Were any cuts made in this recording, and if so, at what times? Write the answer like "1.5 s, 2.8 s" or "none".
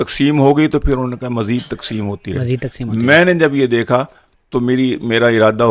none